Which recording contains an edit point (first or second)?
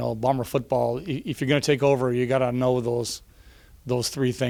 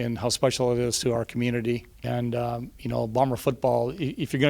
second